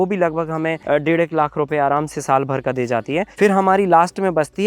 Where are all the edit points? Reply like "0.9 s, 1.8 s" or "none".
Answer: 0.8 s, 3.3 s